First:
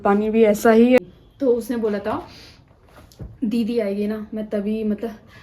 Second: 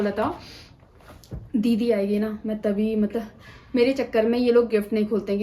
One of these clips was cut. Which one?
first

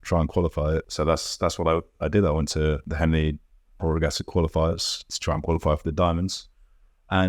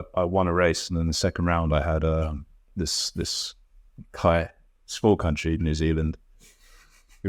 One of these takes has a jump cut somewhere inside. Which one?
first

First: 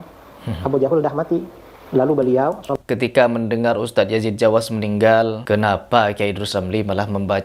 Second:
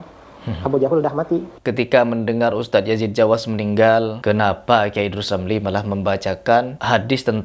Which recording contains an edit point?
second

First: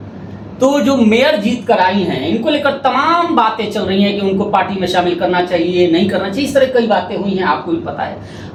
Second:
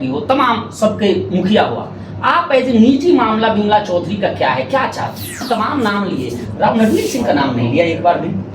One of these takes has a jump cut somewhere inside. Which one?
second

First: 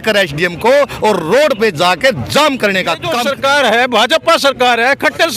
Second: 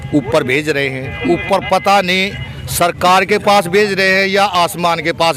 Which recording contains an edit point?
first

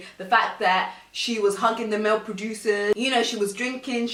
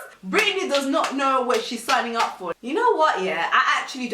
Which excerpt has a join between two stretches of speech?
second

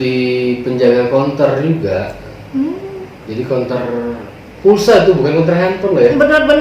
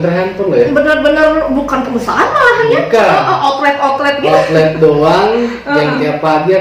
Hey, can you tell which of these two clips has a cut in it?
first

